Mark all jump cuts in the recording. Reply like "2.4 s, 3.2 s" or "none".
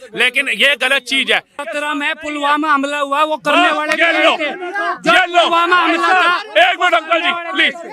1.5 s

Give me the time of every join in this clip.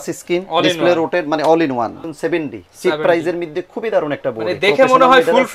2.0 s

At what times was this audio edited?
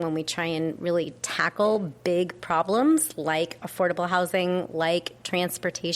none

